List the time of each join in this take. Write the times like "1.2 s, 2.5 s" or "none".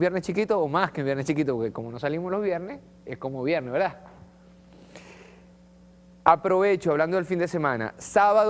4.9 s